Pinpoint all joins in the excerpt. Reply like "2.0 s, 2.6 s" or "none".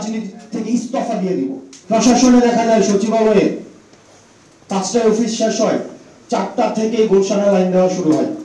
1.7 s

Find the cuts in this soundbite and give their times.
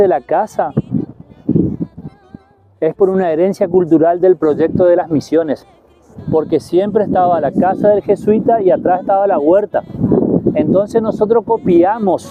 none

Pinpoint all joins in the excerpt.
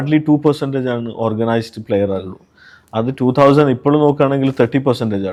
none

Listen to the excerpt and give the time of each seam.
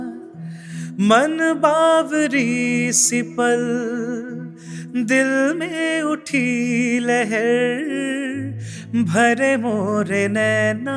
none

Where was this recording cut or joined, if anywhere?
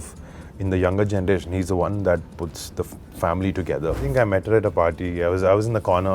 4.1 s

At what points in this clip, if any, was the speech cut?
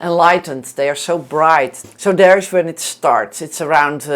1.8 s

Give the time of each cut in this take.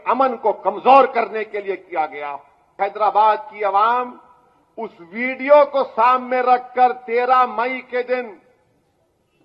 2.7 s

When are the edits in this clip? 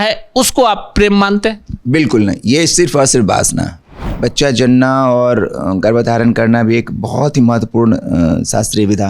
4.1 s

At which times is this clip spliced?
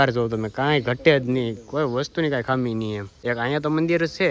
none

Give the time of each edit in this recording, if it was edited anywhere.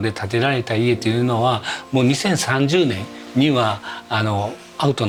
none

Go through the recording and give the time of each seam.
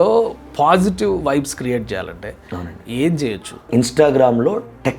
3.7 s

